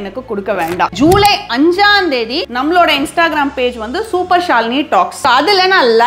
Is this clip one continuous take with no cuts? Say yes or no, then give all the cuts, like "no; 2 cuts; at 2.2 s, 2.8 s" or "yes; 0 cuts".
no; 3 cuts; at 0.9 s, 2.4 s, 5.2 s